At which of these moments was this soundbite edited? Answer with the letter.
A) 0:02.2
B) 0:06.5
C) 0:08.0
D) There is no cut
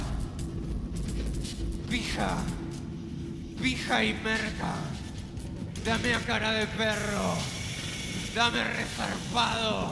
D